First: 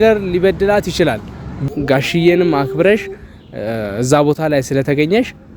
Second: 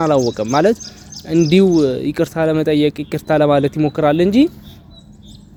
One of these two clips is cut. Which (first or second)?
first